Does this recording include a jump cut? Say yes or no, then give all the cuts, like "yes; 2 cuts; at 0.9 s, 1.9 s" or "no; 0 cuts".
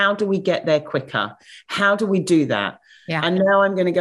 no; 0 cuts